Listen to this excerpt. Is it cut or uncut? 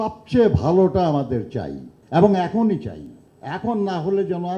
uncut